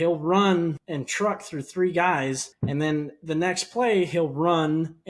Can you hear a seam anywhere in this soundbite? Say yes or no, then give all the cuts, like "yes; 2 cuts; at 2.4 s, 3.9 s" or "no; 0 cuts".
yes; 2 cuts; at 0.9 s, 2.5 s